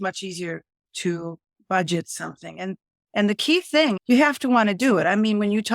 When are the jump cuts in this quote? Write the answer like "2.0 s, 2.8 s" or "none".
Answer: 4.0 s